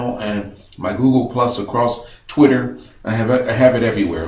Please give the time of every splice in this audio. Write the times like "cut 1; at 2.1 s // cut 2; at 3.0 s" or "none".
cut 1; at 2.4 s